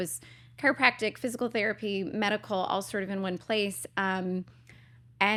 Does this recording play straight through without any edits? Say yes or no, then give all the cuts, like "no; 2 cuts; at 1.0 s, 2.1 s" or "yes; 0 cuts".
yes; 0 cuts